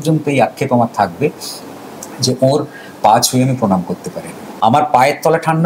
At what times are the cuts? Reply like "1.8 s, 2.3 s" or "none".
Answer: 4.5 s